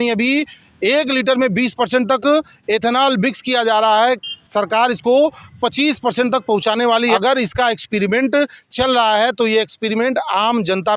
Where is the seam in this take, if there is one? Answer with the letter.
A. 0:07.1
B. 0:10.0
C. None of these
A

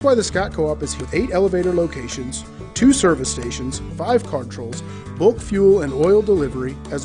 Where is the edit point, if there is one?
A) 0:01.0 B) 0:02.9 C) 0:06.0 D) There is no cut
A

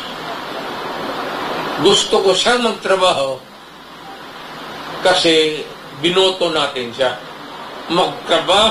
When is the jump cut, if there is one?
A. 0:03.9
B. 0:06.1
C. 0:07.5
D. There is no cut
D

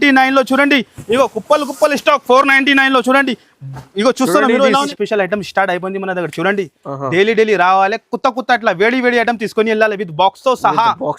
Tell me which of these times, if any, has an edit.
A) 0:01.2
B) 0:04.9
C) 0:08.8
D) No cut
B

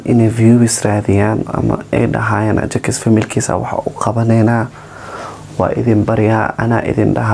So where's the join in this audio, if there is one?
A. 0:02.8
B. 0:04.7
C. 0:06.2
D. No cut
D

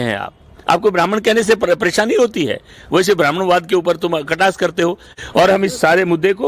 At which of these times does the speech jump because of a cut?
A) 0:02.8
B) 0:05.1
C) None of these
B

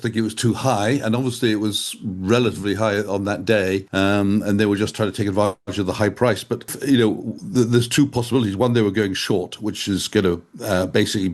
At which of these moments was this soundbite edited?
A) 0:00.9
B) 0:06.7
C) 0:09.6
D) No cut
B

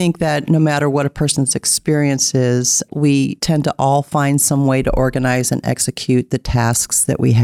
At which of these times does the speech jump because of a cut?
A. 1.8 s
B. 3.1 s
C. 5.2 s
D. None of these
B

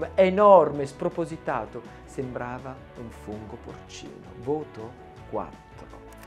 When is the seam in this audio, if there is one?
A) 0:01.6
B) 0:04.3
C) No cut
C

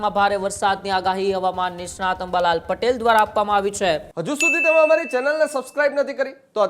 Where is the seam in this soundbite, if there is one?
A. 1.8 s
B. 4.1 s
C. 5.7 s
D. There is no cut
B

